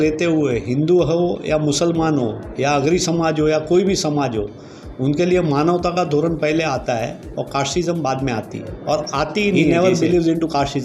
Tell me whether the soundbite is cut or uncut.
cut